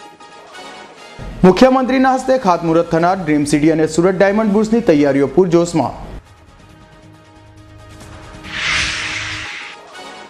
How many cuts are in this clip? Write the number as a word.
one